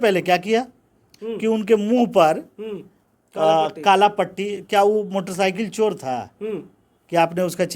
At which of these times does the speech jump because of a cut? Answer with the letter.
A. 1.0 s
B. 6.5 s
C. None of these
A